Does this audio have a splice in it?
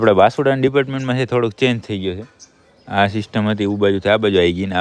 no; 0 cuts

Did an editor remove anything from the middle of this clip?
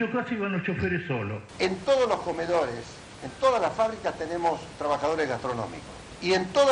yes; 1 cut; at 1.4 s

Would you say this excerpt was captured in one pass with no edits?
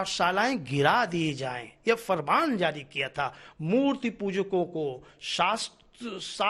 yes; 0 cuts

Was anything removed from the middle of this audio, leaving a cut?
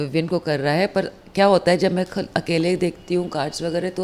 no; 0 cuts

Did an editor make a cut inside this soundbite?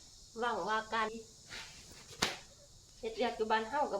yes; 1 cut; at 1.1 s

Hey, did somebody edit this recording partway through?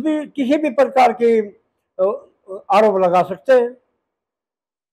no; 0 cuts

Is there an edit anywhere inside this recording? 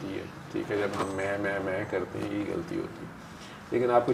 no; 0 cuts

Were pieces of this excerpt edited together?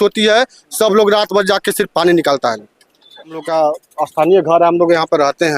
yes; 1 cut; at 3.4 s

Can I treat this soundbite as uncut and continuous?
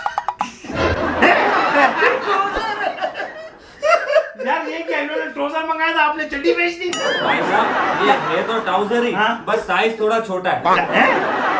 yes; 0 cuts

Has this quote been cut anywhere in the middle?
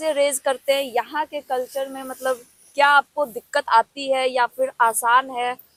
no; 0 cuts

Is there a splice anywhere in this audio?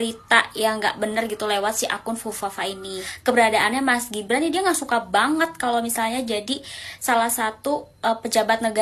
yes; 1 cut; at 3.1 s

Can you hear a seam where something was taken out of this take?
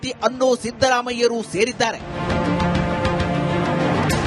no; 0 cuts

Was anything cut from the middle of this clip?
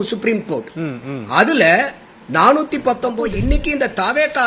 yes; 1 cut; at 3.2 s

